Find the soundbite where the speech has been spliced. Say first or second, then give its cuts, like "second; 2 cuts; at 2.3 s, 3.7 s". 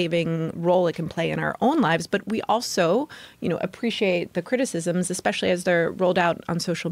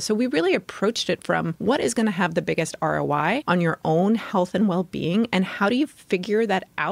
second; 2 cuts; at 1.5 s, 3.4 s